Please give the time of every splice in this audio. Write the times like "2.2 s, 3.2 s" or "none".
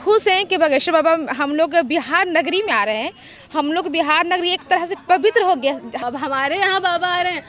6.0 s